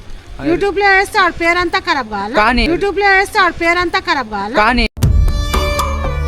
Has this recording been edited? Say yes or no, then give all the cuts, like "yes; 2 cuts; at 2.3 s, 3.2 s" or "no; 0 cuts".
no; 0 cuts